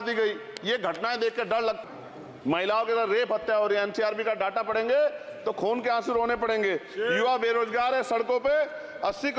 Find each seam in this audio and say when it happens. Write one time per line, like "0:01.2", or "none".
0:01.8